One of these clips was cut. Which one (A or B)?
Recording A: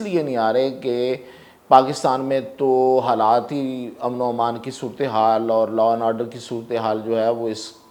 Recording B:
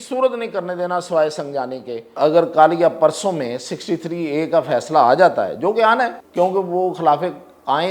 B